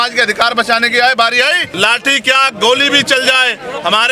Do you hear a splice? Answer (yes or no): yes